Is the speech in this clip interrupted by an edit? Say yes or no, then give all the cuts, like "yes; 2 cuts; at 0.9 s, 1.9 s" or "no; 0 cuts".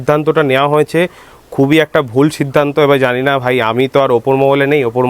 no; 0 cuts